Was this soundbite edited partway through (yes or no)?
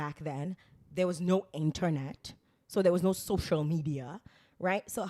no